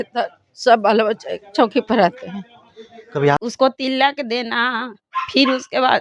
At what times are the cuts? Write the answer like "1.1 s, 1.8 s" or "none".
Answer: 3.4 s